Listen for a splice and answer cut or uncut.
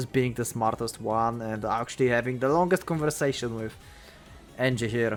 uncut